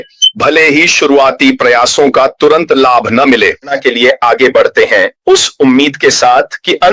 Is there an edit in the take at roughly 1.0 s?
no; 1 cut; at 3.8 s

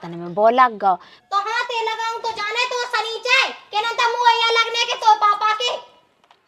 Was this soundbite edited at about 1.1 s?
yes; 1 cut; at 1.1 s

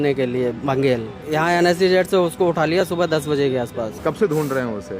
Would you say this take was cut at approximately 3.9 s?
yes; 2 cuts; at 1.2 s, 3.9 s

